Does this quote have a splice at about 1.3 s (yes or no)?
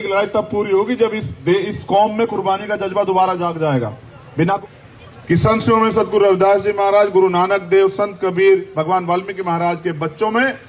no